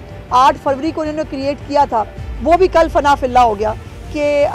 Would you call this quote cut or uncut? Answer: uncut